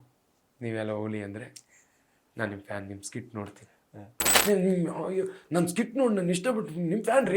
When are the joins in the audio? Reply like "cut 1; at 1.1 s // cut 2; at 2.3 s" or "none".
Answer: cut 1; at 4.3 s